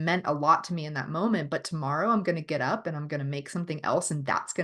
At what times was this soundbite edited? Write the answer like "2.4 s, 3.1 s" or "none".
none